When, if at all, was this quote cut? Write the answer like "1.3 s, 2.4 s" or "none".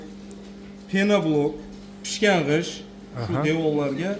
none